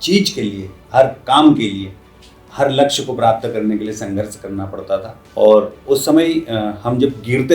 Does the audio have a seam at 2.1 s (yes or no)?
no